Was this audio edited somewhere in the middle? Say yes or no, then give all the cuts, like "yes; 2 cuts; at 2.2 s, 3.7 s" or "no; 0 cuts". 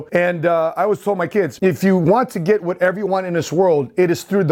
yes; 1 cut; at 1.5 s